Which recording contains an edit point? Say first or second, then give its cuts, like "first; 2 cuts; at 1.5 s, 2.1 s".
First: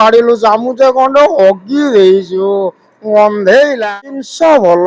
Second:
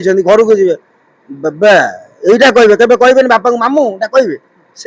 first; 1 cut; at 3.9 s